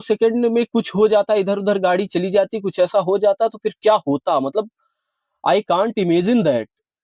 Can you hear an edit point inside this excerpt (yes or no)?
no